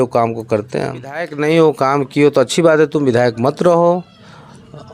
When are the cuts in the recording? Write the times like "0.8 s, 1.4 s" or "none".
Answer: 1.3 s